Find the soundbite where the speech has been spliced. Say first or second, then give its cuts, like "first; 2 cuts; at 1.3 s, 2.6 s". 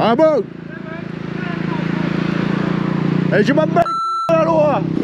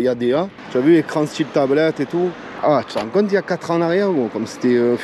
second; 1 cut; at 2.5 s